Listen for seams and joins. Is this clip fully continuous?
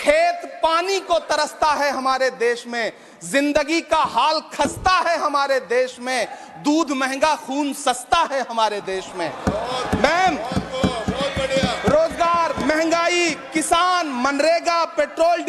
yes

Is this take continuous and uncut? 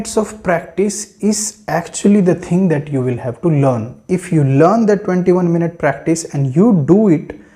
yes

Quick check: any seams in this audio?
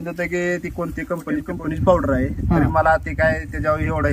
no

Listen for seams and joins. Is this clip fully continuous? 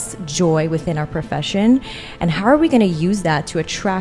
yes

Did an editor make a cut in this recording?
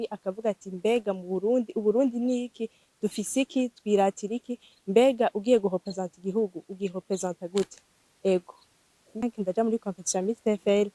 yes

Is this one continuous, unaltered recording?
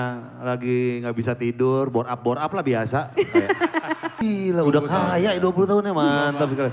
no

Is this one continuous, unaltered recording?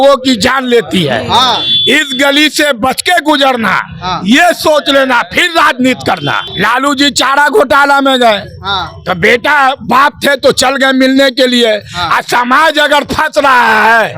no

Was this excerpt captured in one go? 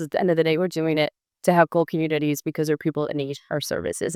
yes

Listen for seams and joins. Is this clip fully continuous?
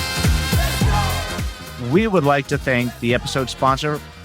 no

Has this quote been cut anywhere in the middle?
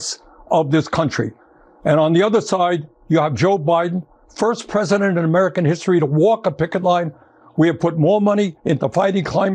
no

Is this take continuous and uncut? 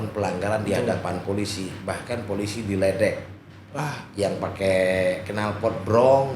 yes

